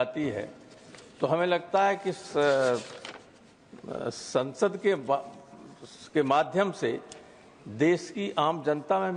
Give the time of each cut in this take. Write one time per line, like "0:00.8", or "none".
none